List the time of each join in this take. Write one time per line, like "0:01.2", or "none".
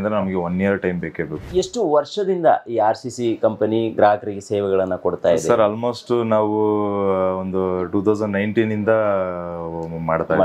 0:01.5